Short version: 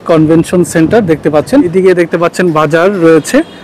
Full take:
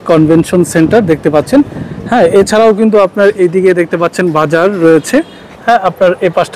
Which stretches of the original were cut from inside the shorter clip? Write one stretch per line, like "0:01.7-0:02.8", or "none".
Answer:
0:01.7-0:03.5